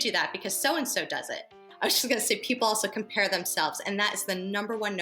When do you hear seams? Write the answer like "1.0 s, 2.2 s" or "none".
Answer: 1.6 s